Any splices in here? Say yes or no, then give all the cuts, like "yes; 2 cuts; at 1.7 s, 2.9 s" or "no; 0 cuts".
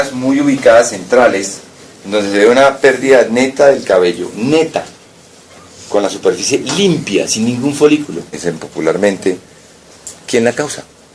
no; 0 cuts